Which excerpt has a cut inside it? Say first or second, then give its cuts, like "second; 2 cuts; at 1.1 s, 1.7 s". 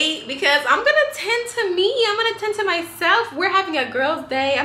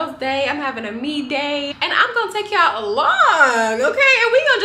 second; 1 cut; at 1.7 s